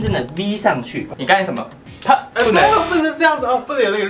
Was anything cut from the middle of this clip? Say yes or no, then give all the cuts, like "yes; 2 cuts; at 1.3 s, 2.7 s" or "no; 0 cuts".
yes; 1 cut; at 1.0 s